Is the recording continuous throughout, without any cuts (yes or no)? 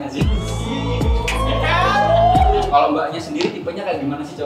no